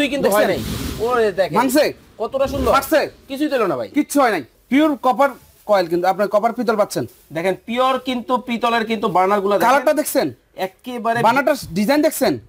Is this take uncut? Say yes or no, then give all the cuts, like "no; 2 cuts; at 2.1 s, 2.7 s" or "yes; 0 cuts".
no; 1 cut; at 4.5 s